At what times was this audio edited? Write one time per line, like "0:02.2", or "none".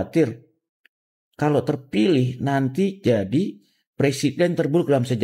none